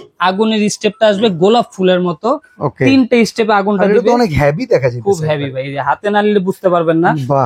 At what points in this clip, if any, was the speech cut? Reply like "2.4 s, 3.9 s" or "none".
none